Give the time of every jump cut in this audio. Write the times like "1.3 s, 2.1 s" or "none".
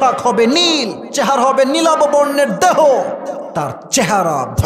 1.0 s, 3.5 s